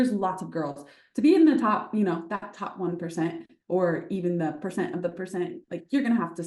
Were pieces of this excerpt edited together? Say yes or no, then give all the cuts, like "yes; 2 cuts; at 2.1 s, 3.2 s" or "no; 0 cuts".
no; 0 cuts